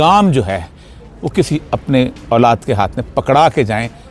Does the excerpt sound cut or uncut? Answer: uncut